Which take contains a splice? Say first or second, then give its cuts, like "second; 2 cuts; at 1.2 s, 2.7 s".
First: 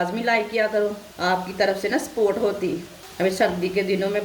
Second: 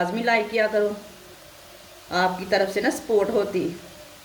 first; 2 cuts; at 1.1 s, 3.0 s